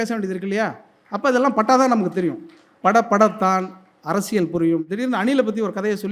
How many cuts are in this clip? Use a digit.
1